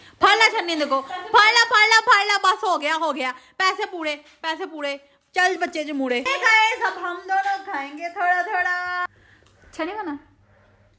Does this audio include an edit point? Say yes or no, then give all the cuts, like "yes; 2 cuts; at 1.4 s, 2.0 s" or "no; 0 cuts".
no; 0 cuts